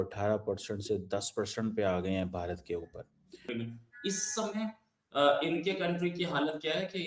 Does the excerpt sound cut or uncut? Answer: cut